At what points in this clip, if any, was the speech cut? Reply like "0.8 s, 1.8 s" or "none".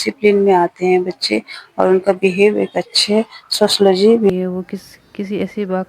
4.3 s